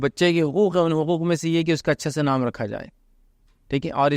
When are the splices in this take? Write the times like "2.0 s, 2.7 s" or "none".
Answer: none

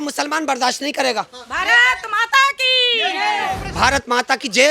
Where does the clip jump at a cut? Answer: 3.6 s

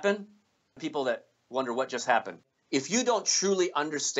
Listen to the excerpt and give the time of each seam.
0.8 s, 2.5 s

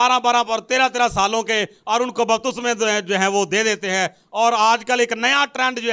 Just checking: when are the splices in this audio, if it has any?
none

